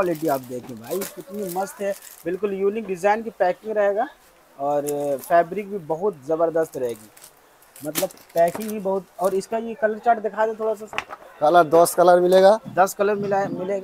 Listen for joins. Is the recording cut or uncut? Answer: uncut